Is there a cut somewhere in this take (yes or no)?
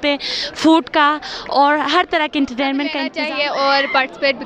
yes